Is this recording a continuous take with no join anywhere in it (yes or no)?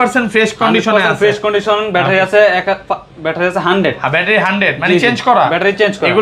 yes